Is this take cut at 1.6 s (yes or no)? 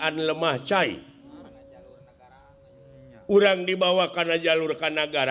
yes